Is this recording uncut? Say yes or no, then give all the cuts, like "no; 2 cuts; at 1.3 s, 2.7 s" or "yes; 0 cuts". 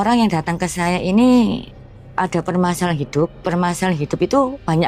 yes; 0 cuts